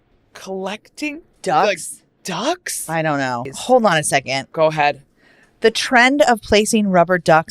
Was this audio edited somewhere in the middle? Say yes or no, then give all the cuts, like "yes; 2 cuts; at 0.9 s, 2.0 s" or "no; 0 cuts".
yes; 2 cuts; at 1.3 s, 3.5 s